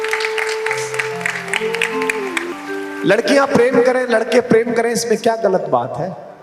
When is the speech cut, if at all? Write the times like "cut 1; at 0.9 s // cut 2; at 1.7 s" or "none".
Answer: cut 1; at 2.6 s

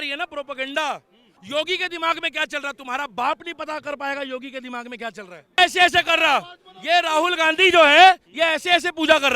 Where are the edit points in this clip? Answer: cut 1; at 5.6 s

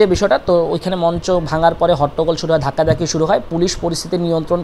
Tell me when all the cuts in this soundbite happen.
none

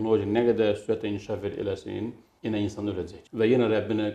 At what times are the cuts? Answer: none

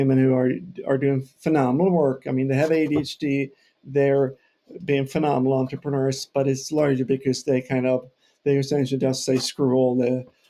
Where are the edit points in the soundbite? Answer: none

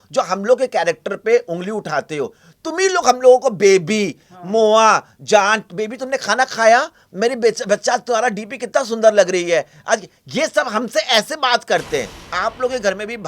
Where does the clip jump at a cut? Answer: cut 1; at 12.2 s

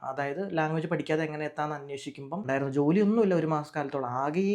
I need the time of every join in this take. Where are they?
cut 1; at 2.4 s

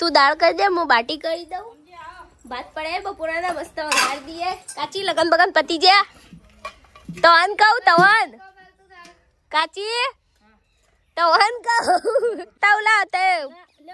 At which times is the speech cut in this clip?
cut 1; at 12.6 s

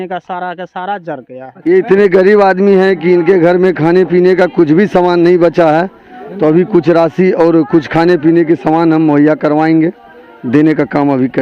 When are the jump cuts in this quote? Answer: cut 1; at 1.5 s

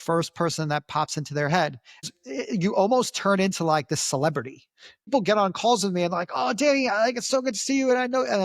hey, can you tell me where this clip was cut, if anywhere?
cut 1; at 2.1 s // cut 2; at 5.1 s

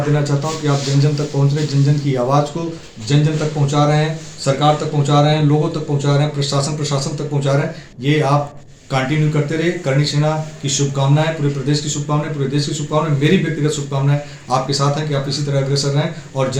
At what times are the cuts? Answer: none

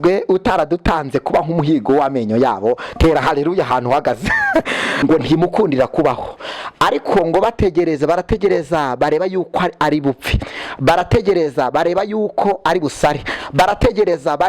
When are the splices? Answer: cut 1; at 4.9 s

